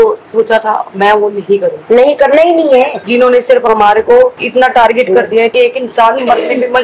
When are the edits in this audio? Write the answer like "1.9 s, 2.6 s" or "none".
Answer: 3.0 s, 5.5 s